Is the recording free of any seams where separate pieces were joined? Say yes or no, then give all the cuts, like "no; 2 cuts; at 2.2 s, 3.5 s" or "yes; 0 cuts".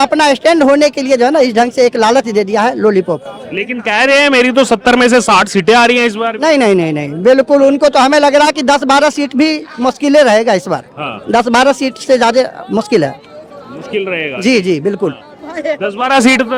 yes; 0 cuts